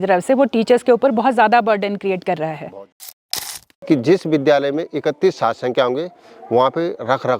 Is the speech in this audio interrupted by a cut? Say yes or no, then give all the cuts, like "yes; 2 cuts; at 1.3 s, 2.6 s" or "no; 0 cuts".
yes; 1 cut; at 3.4 s